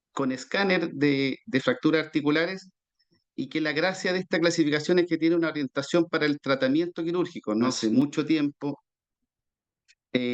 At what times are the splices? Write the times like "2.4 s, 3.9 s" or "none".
7.8 s